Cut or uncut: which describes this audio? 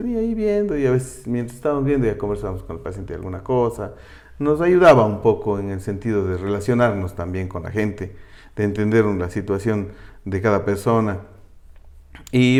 uncut